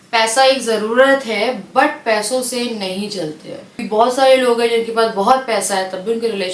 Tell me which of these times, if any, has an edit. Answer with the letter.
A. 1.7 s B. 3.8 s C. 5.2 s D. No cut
B